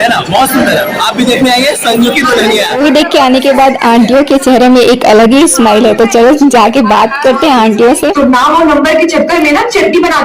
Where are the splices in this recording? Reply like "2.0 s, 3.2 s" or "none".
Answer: 2.8 s, 8.1 s